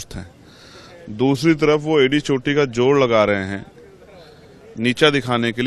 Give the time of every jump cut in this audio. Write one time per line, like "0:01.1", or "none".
none